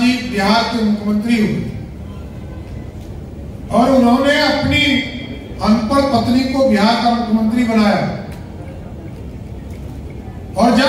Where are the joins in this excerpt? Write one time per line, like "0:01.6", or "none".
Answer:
none